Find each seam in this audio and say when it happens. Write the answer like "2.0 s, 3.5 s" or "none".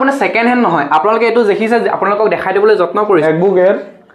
3.2 s